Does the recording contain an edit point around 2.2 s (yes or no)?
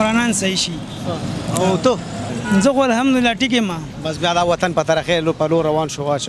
yes